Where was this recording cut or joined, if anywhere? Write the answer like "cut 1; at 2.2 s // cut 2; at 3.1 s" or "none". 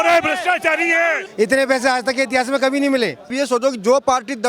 cut 1; at 1.2 s // cut 2; at 3.3 s